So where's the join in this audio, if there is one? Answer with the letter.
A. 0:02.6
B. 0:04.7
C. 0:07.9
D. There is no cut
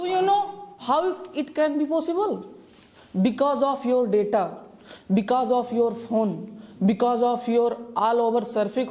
D